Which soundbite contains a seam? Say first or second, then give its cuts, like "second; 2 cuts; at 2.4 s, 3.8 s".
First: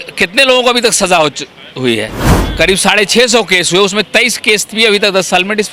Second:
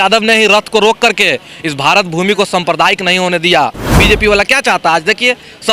second; 1 cut; at 3.9 s